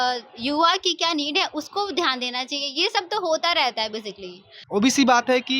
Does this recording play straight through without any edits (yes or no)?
no